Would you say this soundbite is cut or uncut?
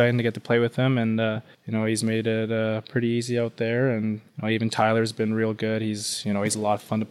cut